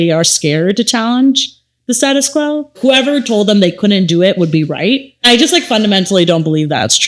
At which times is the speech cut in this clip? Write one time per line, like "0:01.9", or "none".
0:02.8
0:05.2